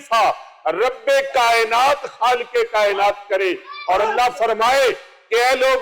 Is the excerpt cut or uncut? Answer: uncut